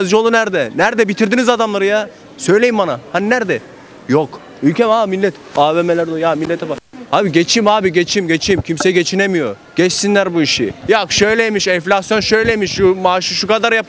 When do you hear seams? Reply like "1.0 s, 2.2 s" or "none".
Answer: none